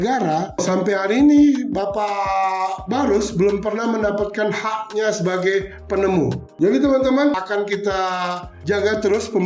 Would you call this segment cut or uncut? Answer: uncut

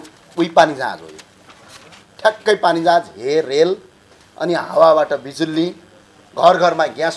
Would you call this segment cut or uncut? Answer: uncut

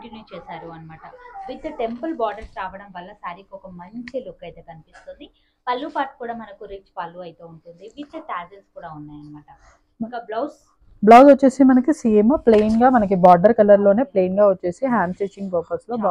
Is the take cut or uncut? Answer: uncut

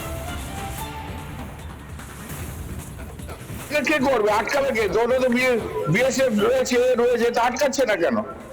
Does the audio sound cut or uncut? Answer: cut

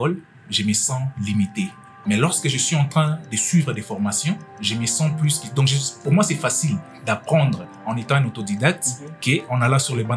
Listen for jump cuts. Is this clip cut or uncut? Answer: uncut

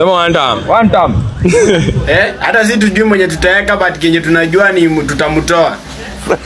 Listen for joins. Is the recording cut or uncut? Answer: cut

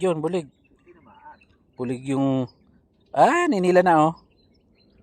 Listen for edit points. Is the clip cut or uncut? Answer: uncut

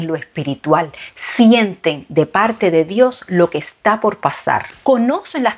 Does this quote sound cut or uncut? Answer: cut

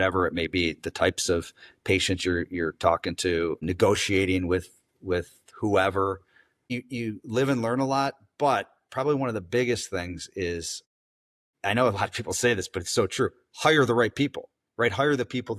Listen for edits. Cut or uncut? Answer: cut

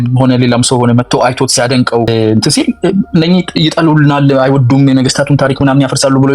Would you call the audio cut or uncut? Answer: cut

